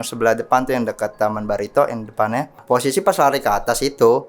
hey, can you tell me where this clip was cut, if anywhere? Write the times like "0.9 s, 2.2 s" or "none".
2.6 s